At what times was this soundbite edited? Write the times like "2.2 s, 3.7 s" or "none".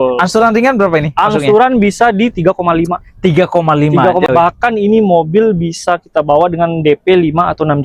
4.3 s

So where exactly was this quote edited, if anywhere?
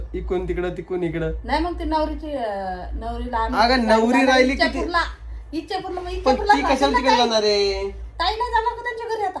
none

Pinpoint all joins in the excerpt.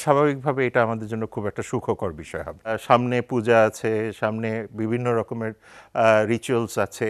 2.8 s

